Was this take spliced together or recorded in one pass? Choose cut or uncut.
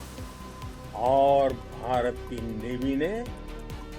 cut